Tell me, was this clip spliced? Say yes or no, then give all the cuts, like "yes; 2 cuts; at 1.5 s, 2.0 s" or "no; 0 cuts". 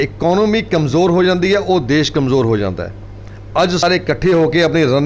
yes; 1 cut; at 3.8 s